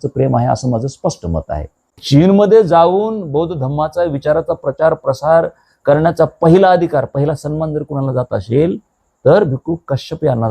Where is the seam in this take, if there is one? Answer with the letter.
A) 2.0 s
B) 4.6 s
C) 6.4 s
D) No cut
A